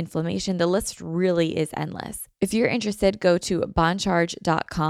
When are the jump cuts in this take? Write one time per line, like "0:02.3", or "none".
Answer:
0:02.2